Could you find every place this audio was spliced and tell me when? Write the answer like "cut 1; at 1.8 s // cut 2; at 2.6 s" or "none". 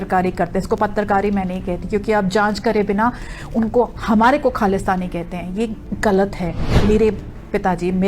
cut 1; at 6.6 s